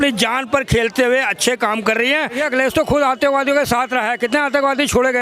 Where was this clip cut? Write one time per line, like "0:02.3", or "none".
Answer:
0:02.4